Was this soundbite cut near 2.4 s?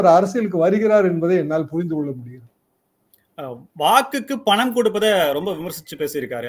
no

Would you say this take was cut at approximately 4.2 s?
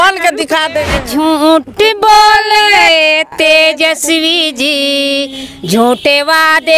no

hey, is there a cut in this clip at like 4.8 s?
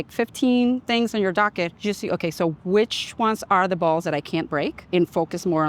yes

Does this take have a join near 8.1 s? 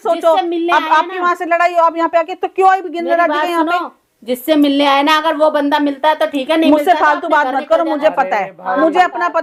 no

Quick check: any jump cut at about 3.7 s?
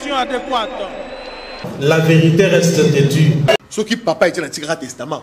yes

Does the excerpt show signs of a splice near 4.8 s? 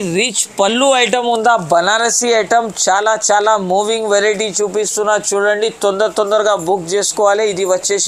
no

